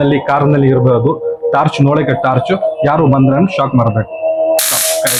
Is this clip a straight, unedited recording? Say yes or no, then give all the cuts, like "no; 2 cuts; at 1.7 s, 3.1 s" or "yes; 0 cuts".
yes; 0 cuts